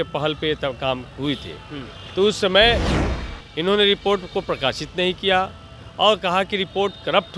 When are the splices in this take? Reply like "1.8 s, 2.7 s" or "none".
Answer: none